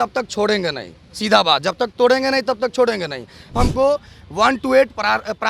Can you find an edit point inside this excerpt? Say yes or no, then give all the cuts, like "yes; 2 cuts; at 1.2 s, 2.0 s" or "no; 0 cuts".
yes; 1 cut; at 3.5 s